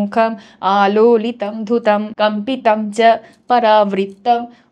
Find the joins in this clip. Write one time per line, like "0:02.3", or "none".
0:02.1